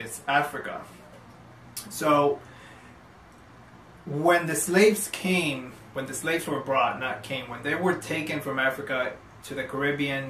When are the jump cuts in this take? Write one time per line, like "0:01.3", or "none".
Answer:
none